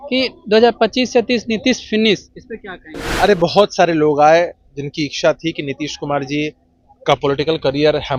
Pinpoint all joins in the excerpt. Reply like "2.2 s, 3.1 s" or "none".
none